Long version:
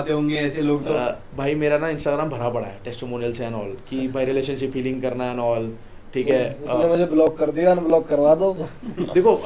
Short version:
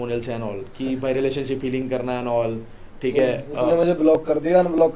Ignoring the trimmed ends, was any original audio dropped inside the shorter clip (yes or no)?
no